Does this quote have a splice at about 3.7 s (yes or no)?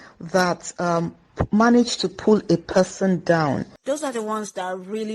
yes